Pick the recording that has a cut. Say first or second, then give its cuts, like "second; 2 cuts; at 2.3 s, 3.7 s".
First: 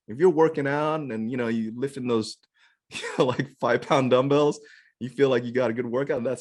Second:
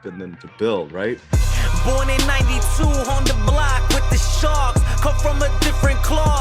second; 1 cut; at 1.2 s